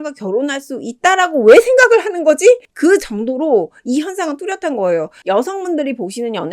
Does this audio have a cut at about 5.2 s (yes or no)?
yes